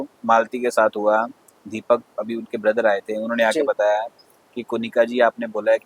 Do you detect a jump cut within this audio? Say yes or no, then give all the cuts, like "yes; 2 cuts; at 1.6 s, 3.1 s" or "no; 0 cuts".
no; 0 cuts